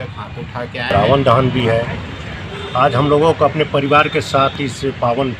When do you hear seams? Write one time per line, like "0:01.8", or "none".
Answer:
0:00.9